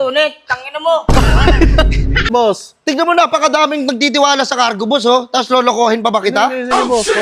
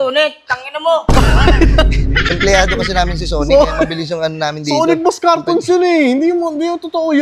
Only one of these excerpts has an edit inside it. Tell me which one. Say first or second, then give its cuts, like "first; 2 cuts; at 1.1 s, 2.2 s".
first; 1 cut; at 2.3 s